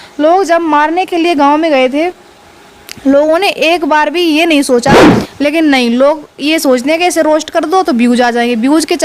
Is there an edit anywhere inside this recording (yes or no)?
yes